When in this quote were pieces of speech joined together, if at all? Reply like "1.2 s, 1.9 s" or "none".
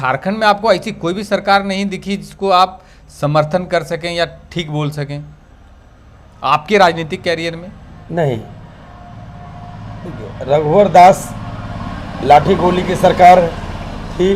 none